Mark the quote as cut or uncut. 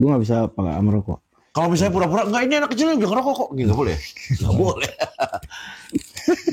uncut